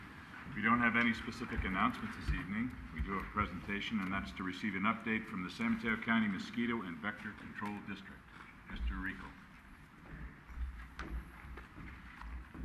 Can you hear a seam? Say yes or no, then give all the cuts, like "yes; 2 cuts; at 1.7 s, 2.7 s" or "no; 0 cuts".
yes; 1 cut; at 2.9 s